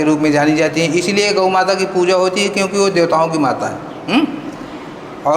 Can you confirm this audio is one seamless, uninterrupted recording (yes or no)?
yes